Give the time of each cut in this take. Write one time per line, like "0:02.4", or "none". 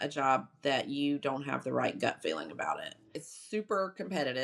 0:03.3